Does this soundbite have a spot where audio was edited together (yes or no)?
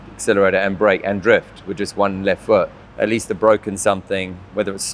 yes